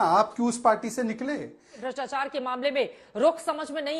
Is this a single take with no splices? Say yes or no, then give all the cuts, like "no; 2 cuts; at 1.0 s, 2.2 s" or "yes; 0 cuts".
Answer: no; 1 cut; at 1.8 s